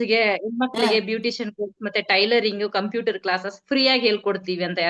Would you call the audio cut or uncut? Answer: uncut